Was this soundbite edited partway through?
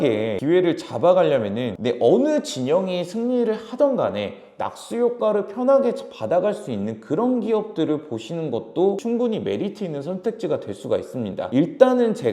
yes; 2 cuts; at 1.8 s, 9.0 s

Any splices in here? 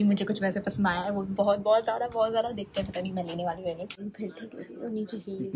yes; 1 cut; at 4.0 s

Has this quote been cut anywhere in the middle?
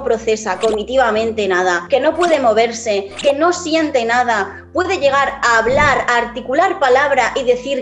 no; 0 cuts

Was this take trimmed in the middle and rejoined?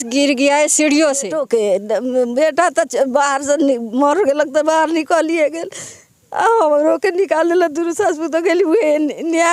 yes; 1 cut; at 1.4 s

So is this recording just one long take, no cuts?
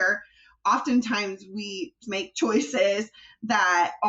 no; 1 cut; at 2.1 s

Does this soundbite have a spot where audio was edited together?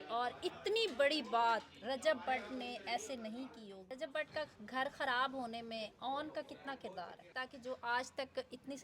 yes; 2 cuts; at 3.9 s, 7.4 s

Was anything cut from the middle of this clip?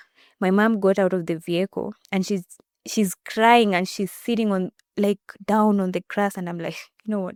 no; 0 cuts

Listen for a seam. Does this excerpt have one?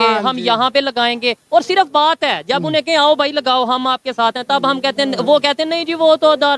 no; 0 cuts

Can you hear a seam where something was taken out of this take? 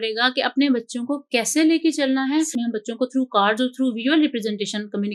yes; 1 cut; at 2.5 s

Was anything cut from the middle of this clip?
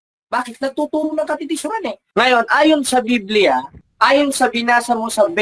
yes; 2 cuts; at 2.1 s, 3.8 s

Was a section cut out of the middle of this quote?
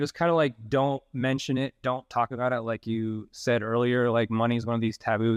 no; 0 cuts

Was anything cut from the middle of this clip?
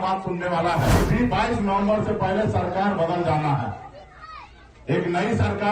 yes; 1 cut; at 1.0 s

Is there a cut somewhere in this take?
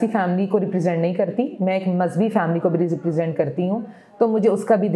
no; 0 cuts

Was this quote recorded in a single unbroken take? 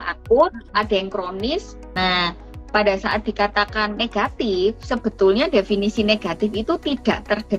no; 1 cut; at 1.8 s

